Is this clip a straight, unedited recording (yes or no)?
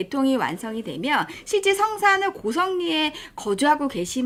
yes